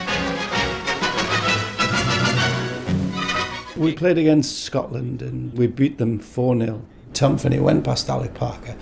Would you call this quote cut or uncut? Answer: cut